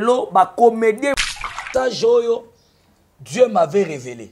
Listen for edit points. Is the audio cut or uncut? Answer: cut